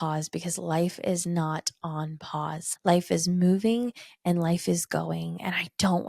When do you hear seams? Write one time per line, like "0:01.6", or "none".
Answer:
0:02.7